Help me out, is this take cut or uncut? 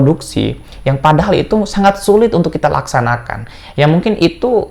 uncut